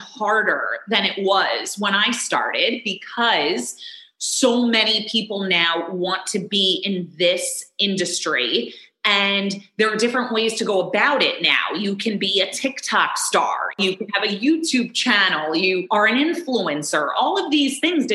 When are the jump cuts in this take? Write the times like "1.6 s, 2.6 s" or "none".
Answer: 13.8 s, 15.8 s